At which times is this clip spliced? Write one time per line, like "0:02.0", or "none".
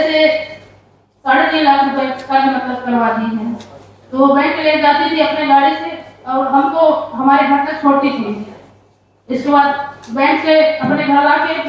none

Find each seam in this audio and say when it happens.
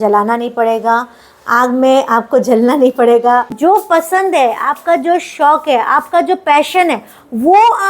0:03.5

